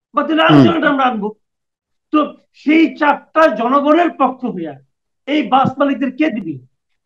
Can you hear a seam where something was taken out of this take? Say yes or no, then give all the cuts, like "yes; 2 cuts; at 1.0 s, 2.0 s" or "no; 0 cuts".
no; 0 cuts